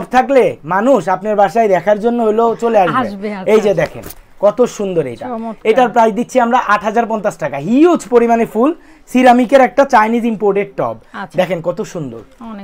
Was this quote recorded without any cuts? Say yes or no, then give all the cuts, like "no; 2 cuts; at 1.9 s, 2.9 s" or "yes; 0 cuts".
yes; 0 cuts